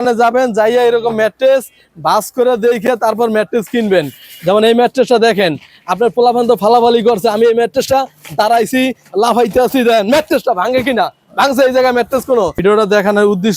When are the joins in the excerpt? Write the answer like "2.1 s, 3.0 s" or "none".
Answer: 12.6 s